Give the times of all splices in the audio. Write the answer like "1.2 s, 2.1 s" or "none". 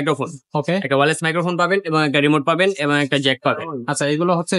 none